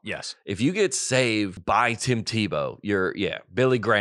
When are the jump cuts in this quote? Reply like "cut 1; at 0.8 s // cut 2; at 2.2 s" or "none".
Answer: cut 1; at 1.6 s